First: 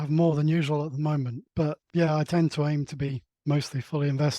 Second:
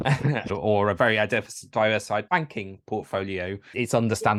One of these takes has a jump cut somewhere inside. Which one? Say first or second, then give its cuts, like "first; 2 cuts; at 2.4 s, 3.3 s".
first; 1 cut; at 1.6 s